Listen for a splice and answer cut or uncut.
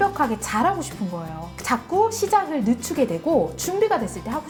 uncut